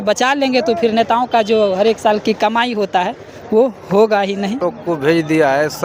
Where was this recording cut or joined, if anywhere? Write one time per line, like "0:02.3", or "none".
0:04.6